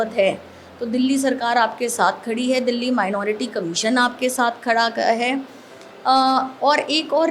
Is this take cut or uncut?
uncut